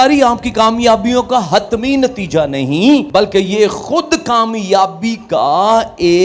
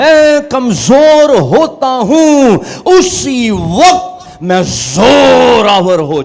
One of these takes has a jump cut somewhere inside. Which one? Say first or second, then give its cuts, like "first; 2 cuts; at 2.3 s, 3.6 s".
first; 1 cut; at 3.1 s